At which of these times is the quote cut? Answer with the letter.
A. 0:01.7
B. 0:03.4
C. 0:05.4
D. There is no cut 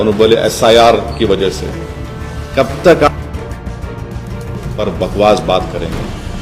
D